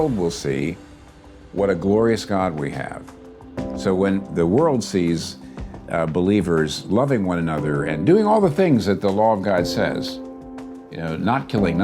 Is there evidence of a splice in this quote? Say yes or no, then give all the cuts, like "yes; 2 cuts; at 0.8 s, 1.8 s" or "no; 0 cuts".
yes; 1 cut; at 4.2 s